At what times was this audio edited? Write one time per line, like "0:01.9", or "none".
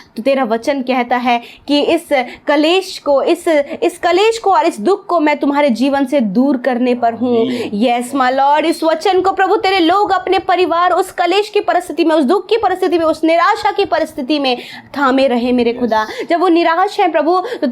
none